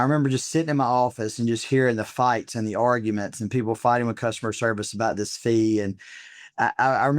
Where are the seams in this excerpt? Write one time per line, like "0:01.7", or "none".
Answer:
none